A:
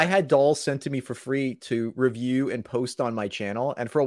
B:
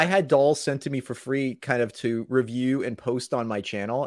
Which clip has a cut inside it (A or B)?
A